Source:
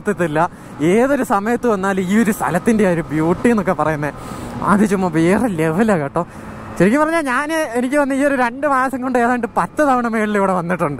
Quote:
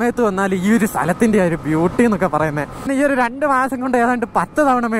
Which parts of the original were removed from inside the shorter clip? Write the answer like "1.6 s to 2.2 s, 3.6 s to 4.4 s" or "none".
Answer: 4.3 s to 8.1 s